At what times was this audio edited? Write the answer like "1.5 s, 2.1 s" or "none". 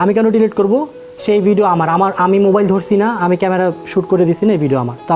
none